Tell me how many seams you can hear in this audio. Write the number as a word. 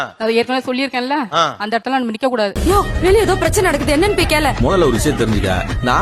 zero